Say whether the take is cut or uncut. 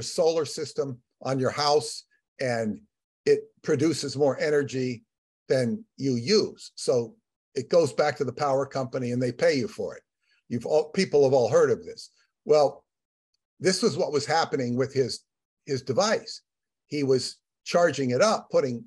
uncut